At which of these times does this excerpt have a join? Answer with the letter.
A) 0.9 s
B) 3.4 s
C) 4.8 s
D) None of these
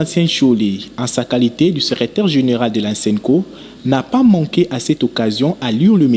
D